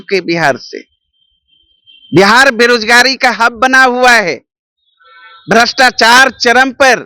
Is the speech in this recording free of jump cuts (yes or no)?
yes